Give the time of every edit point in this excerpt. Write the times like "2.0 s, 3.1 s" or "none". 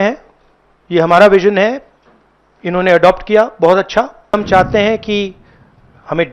4.4 s